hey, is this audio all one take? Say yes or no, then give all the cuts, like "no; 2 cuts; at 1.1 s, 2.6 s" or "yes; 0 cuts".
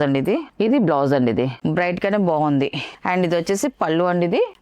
no; 1 cut; at 1.6 s